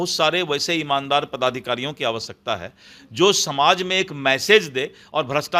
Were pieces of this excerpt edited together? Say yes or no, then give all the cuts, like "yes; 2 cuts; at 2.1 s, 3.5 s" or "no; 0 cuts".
no; 0 cuts